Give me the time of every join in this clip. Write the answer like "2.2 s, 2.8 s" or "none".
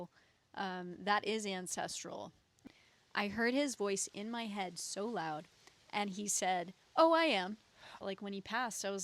2.5 s, 7.9 s

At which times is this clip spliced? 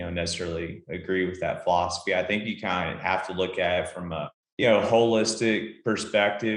4.4 s

